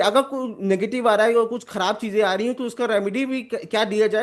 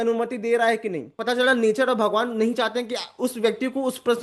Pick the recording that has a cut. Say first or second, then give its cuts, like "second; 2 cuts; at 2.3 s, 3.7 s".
second; 1 cut; at 1.1 s